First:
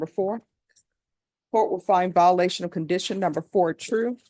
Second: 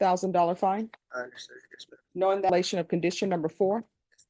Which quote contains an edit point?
second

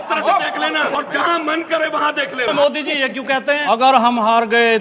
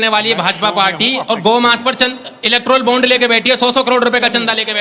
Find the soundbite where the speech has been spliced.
first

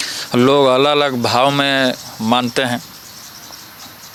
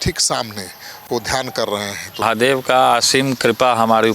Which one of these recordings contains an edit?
second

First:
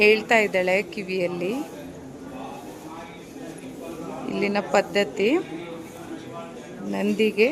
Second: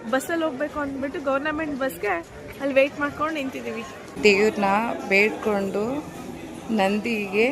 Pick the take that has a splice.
second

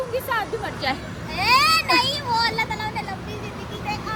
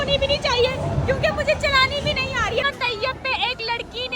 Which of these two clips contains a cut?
second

